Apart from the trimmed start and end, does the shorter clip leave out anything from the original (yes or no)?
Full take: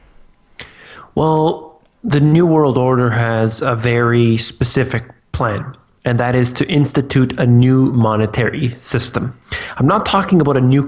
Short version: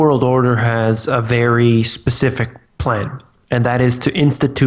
no